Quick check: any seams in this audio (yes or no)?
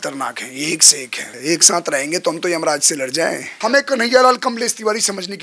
yes